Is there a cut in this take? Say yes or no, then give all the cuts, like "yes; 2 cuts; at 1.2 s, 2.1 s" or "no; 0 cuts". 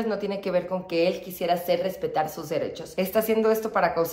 yes; 1 cut; at 2.8 s